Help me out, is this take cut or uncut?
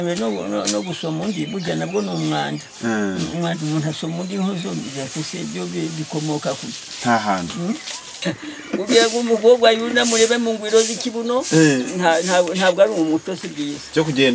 cut